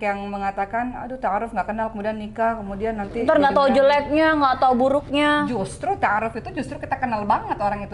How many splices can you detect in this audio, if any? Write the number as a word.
zero